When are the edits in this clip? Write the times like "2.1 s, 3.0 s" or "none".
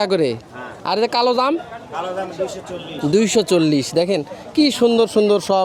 none